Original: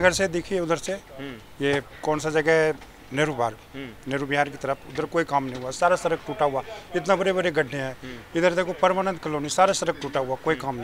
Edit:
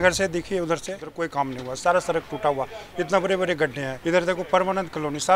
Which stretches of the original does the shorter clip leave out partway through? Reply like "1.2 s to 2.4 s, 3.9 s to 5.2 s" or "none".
1.0 s to 5.0 s, 7.8 s to 8.2 s